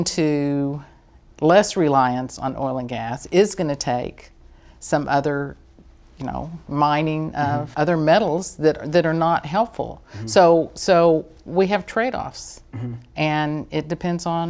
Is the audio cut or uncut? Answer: uncut